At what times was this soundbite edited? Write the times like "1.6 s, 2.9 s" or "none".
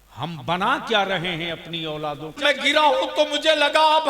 2.4 s